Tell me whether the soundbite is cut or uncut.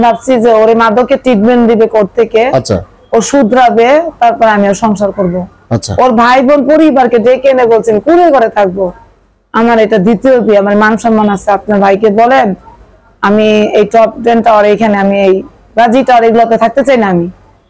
uncut